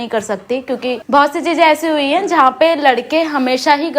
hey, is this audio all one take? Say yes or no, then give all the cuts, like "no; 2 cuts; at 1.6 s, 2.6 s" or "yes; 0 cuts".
no; 1 cut; at 0.9 s